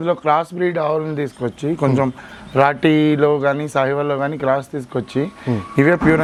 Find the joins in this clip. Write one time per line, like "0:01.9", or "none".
none